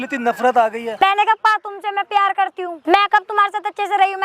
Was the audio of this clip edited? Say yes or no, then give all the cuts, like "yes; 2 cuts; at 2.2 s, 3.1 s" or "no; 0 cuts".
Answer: yes; 2 cuts; at 0.9 s, 2.7 s